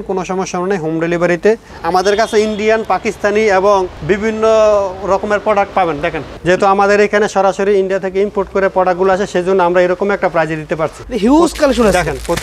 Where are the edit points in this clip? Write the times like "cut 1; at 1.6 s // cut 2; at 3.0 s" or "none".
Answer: cut 1; at 1.7 s // cut 2; at 6.1 s // cut 3; at 11.0 s